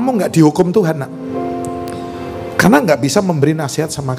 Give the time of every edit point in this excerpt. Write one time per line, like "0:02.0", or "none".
none